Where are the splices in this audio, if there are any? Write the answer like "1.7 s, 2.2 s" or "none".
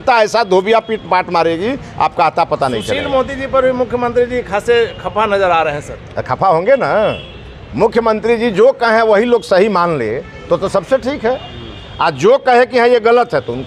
none